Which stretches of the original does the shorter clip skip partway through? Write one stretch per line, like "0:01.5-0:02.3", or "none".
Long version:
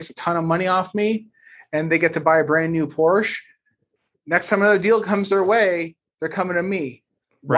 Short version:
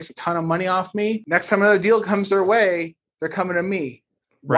0:01.2-0:04.2